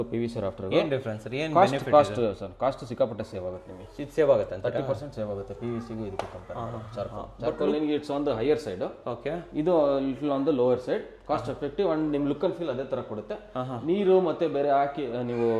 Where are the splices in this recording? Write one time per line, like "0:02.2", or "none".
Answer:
none